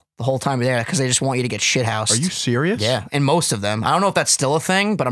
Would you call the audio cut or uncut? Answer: uncut